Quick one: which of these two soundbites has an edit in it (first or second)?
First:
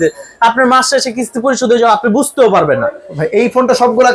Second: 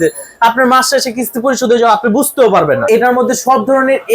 second